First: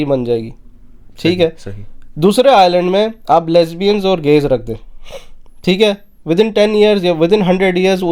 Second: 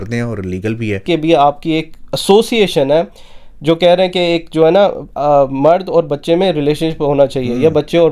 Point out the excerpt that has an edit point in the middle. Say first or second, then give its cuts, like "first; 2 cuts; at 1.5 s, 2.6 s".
second; 1 cut; at 1.0 s